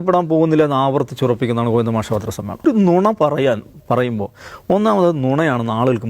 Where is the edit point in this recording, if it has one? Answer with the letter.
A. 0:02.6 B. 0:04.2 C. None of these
A